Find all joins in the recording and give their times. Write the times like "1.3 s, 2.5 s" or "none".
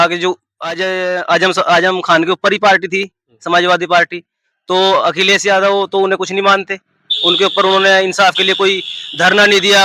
none